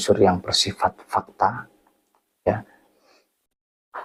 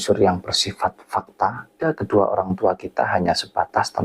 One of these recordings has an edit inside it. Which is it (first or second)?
second